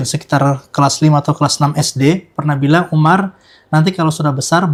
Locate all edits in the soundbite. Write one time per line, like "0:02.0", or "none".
none